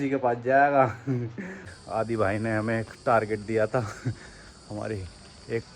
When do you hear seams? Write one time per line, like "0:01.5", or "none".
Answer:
0:01.8

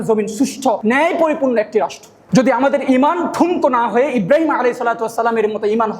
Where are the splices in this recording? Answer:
0:02.1

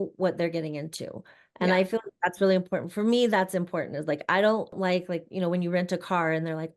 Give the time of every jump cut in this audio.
0:04.8

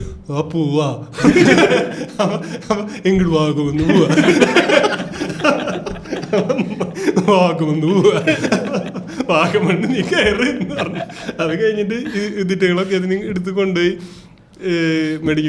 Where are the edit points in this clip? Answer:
none

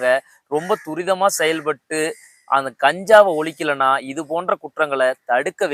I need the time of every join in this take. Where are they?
none

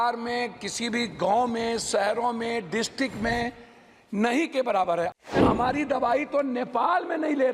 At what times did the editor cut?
0:05.2

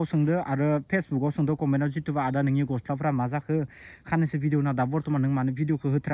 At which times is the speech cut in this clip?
none

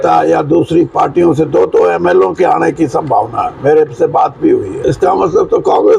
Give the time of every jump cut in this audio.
0:04.8

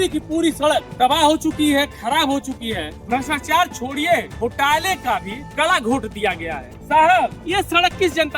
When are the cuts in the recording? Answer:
0:03.0
0:06.7

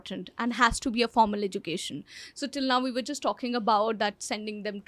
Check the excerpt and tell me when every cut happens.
none

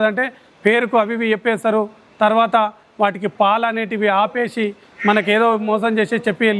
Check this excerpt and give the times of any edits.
none

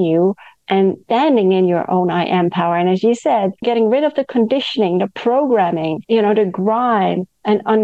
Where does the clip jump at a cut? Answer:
0:01.0
0:03.6
0:06.0

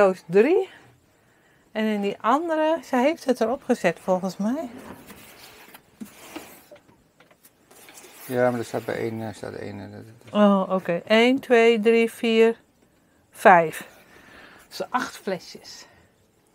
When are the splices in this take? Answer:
none

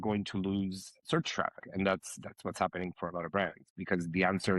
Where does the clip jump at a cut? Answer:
0:01.6

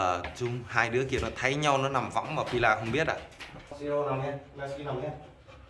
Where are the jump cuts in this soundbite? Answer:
0:03.8

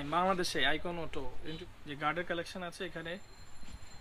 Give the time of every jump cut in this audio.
0:01.4

